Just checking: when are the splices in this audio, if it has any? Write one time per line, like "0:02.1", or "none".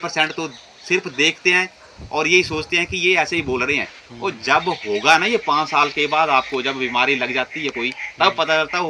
none